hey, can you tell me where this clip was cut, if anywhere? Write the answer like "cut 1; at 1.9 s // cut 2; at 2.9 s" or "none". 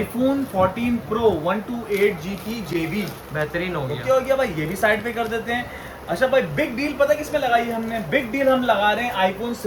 none